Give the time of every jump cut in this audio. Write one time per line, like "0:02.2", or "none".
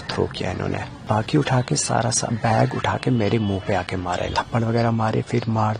0:01.0
0:04.3